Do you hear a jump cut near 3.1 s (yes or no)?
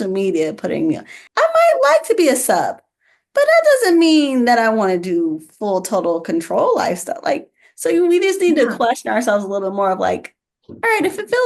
no